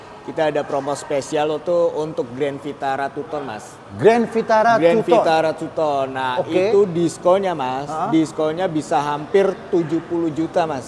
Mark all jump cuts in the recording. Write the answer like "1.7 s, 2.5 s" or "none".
none

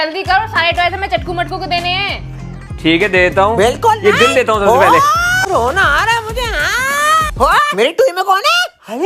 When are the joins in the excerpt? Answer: 5.3 s

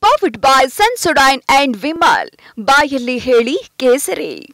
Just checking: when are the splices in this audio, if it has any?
none

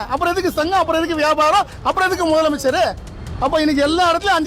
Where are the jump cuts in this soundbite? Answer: none

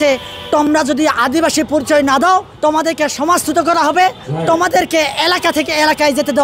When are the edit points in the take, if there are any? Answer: 2.5 s, 4.3 s

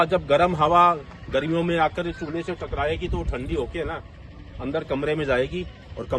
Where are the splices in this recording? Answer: none

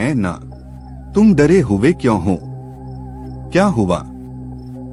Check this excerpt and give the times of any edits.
none

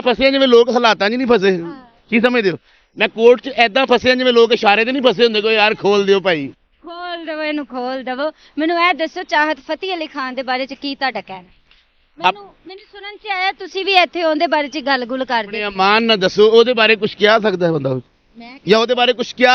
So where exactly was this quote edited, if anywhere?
none

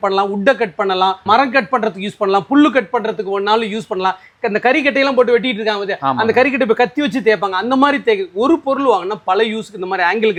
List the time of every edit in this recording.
none

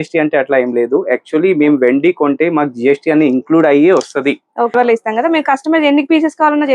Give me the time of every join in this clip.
4.7 s

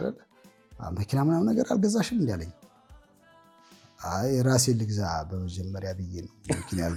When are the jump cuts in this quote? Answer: none

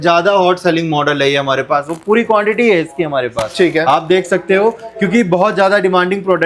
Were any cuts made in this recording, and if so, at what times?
none

